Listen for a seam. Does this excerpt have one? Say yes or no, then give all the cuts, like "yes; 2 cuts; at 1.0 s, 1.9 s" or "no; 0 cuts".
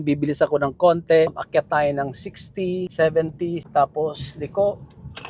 yes; 3 cuts; at 1.4 s, 2.9 s, 3.6 s